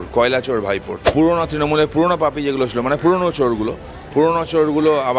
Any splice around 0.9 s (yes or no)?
yes